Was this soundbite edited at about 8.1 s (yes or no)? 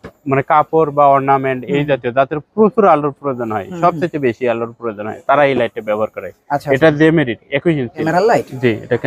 yes